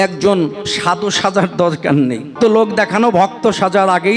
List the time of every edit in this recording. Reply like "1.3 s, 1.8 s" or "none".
2.3 s

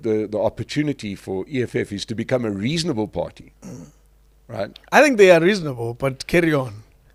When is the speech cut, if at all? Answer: none

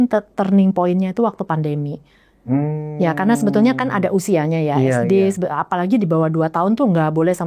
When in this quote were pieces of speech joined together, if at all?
none

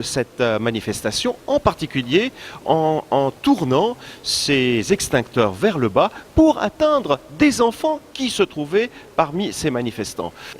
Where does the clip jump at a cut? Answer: 8.6 s

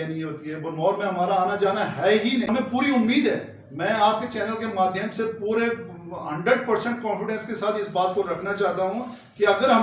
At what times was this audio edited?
2.5 s

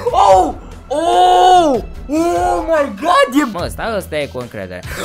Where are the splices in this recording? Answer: 3.5 s

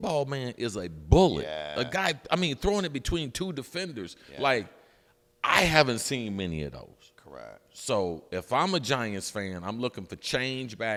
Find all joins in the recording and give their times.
none

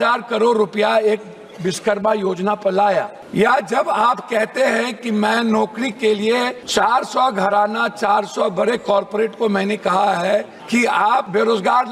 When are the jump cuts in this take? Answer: 3.2 s, 6.6 s, 11.0 s

